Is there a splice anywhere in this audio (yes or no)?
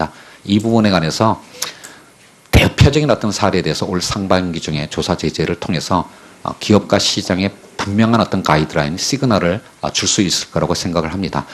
yes